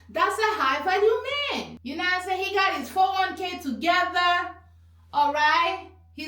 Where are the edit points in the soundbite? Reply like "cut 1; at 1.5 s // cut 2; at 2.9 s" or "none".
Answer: cut 1; at 1.8 s